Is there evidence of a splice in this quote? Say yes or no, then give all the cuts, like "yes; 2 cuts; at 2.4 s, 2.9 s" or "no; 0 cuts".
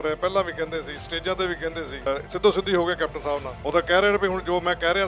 yes; 2 cuts; at 2.1 s, 3.5 s